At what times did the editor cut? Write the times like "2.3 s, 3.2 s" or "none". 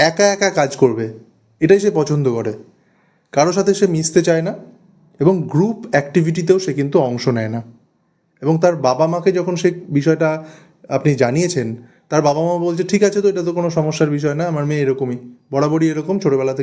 none